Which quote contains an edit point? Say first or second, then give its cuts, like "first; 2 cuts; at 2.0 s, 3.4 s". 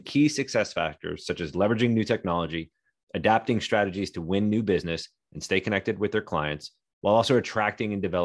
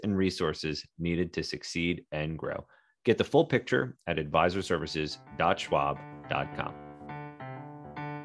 second; 1 cut; at 6.7 s